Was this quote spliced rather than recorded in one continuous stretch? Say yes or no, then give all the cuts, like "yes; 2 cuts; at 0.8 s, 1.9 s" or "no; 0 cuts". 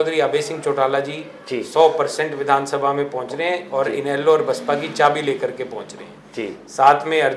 no; 0 cuts